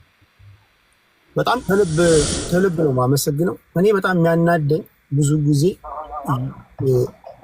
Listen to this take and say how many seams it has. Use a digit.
1